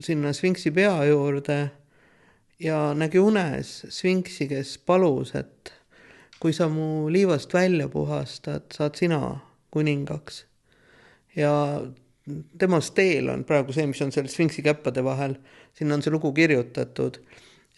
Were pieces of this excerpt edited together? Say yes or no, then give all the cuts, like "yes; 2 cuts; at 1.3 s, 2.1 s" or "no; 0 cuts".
no; 0 cuts